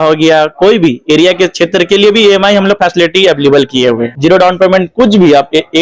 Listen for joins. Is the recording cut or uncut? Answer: cut